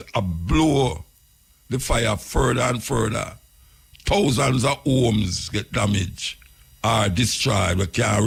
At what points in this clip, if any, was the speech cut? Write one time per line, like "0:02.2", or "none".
none